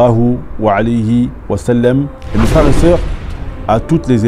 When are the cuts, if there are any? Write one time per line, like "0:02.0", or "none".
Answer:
0:02.2